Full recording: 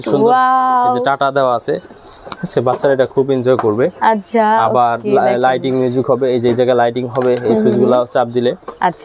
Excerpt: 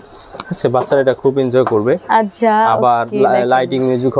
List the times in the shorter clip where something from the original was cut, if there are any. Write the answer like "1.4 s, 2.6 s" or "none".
none